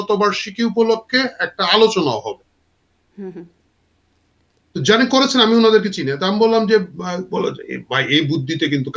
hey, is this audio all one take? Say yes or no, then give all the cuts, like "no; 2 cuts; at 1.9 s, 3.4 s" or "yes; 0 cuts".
yes; 0 cuts